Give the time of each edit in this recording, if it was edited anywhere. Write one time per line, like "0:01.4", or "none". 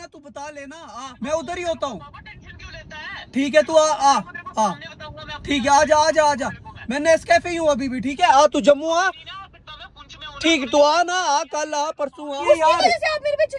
0:01.1
0:12.4